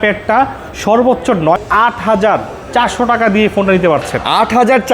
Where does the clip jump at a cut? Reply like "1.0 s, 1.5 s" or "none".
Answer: 1.6 s